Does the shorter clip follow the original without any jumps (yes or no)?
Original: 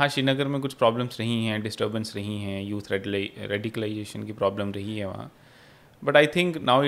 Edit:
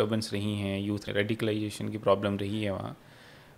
no